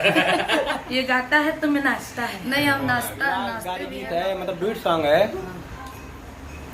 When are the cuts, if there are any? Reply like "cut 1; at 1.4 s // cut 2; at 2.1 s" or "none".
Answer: cut 1; at 3.6 s